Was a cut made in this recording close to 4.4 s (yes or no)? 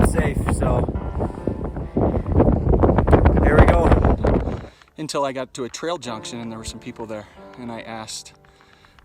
yes